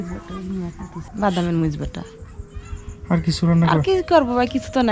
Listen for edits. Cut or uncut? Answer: cut